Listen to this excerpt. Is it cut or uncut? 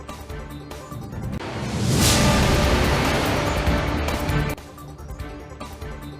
uncut